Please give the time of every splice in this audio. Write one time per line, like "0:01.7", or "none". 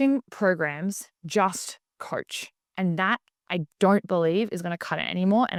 none

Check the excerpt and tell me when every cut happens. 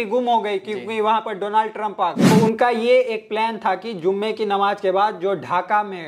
0:02.3

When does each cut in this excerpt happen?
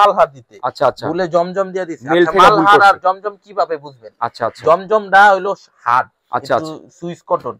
none

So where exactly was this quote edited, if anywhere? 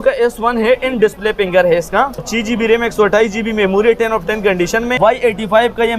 0:02.3
0:05.0

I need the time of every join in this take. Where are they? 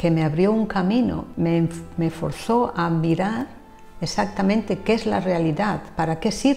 0:01.2

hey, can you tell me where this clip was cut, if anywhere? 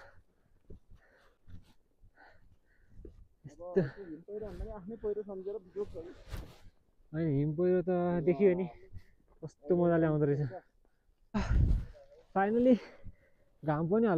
none

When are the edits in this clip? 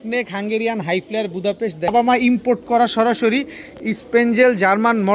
0:01.9

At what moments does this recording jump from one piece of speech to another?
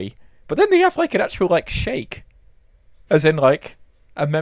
none

